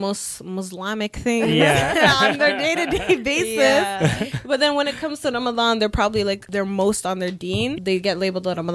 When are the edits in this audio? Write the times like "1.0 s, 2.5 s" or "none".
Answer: 6.4 s, 7.8 s